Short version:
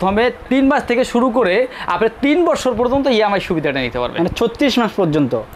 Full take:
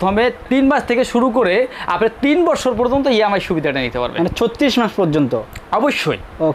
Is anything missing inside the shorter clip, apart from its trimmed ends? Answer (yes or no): no